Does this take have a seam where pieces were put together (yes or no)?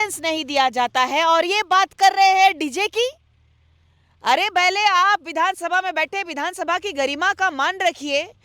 no